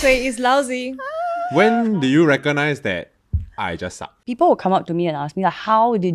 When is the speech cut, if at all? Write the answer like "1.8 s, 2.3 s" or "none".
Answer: 4.2 s